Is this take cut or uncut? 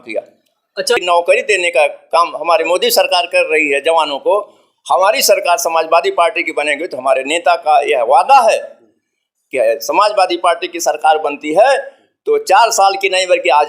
cut